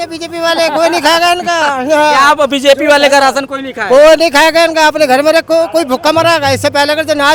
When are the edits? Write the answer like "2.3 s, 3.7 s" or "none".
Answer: none